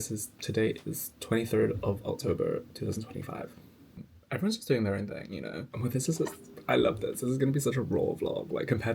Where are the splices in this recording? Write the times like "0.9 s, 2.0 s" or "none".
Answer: 4.1 s, 5.6 s